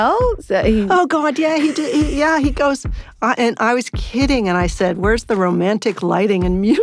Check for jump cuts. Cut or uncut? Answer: cut